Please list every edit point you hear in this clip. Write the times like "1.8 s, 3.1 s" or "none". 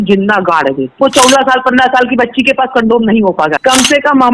1.0 s, 3.6 s